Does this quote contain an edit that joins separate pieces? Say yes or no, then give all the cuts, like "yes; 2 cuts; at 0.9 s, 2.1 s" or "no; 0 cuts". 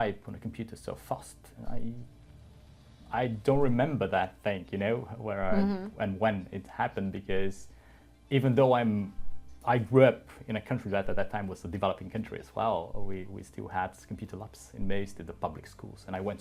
no; 0 cuts